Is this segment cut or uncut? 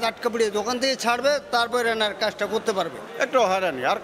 cut